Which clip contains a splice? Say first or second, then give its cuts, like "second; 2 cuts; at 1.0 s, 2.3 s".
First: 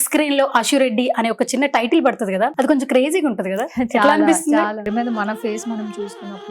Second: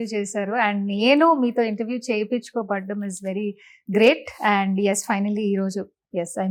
first; 2 cuts; at 2.5 s, 4.9 s